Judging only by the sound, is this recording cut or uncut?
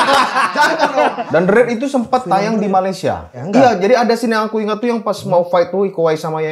cut